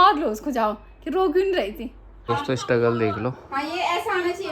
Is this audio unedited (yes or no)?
no